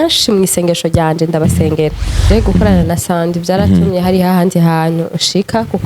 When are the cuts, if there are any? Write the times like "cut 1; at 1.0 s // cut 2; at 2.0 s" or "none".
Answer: cut 1; at 2.2 s